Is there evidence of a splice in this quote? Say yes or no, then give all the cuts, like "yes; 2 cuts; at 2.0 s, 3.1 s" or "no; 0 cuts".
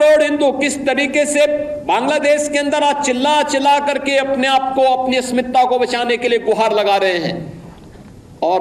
no; 0 cuts